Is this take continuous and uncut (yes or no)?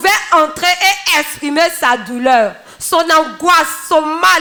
yes